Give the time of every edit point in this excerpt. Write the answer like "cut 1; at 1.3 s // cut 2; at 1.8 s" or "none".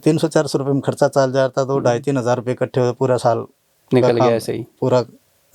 none